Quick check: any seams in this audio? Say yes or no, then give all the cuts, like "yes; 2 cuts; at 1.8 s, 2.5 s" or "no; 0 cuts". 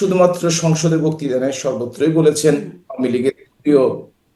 no; 0 cuts